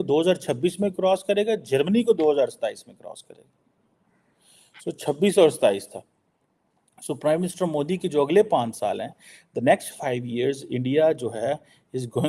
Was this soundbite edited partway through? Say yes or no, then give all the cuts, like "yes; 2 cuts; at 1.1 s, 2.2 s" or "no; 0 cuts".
no; 0 cuts